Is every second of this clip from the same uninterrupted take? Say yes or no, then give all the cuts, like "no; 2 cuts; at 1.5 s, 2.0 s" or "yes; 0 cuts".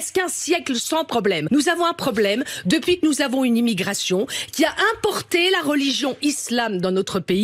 no; 1 cut; at 1.5 s